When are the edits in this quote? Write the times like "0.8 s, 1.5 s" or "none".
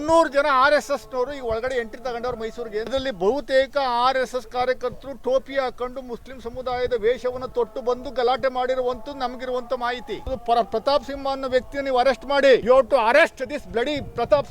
2.9 s, 10.3 s, 12.6 s